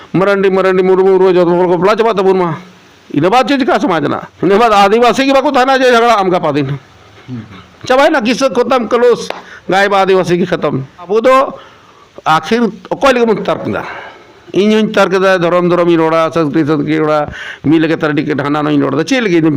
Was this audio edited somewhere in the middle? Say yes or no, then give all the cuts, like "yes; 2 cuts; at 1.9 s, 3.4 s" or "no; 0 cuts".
yes; 2 cuts; at 4.3 s, 11.1 s